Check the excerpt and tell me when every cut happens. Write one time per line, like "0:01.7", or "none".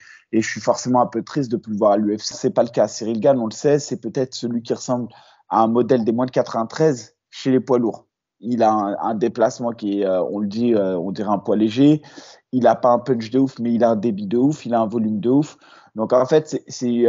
0:02.3

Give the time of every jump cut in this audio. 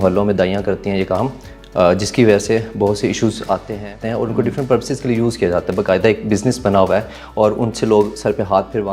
0:04.0

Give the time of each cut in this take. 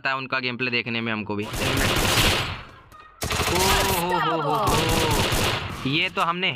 0:01.5

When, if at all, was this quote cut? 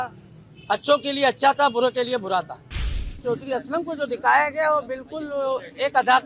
0:03.1

